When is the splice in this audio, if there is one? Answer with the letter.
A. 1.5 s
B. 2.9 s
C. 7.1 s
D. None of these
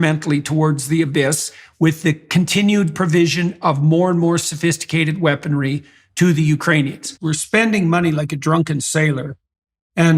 C